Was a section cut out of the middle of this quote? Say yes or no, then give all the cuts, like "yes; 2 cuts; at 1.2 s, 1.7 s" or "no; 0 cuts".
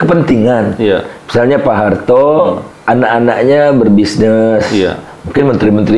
yes; 1 cut; at 2.7 s